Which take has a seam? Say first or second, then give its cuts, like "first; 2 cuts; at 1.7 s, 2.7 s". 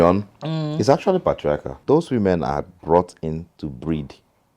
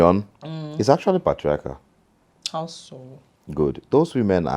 first; 1 cut; at 1.8 s